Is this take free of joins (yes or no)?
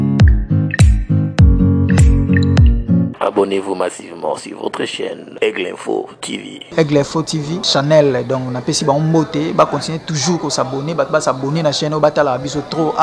yes